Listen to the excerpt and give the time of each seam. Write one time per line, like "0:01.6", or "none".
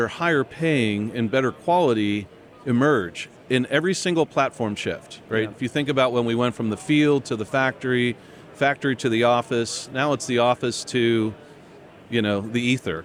none